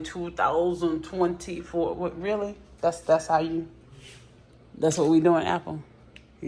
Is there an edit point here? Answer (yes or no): no